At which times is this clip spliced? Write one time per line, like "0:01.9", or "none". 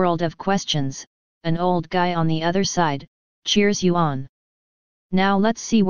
none